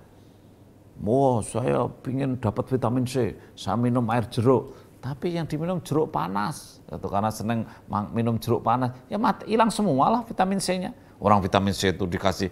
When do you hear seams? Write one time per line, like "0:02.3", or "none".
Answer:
none